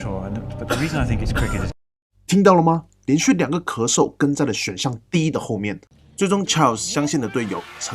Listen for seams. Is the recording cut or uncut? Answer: cut